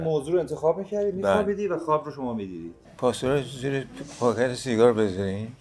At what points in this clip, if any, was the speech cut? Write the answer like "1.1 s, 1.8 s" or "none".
2.8 s